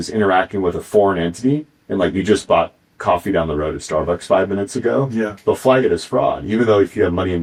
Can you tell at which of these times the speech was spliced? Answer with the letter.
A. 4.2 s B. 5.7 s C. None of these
C